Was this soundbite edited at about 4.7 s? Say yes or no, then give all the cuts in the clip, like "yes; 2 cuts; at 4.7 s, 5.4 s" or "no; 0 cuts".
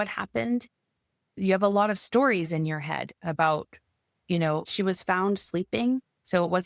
yes; 2 cuts; at 1.4 s, 4.7 s